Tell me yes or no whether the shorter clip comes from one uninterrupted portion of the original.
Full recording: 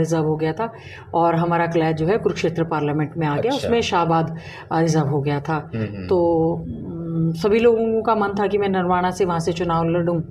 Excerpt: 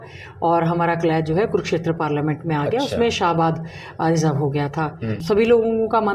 no